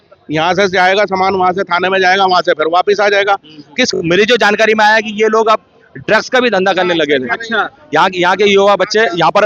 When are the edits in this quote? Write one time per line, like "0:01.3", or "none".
0:03.9